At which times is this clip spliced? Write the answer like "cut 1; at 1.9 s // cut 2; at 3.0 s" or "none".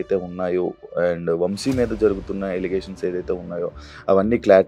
none